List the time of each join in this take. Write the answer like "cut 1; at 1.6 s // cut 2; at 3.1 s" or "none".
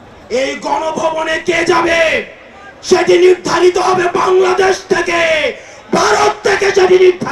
none